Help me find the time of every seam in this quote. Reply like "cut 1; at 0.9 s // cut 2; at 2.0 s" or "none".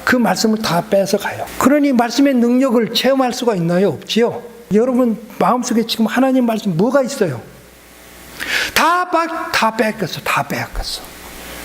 cut 1; at 1.4 s // cut 2; at 4.7 s